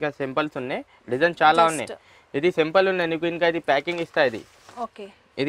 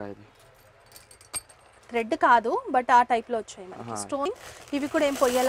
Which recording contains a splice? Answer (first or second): second